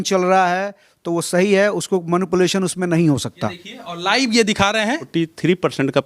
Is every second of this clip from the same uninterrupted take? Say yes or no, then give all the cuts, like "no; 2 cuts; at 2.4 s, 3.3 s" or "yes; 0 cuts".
no; 2 cuts; at 3.6 s, 5.0 s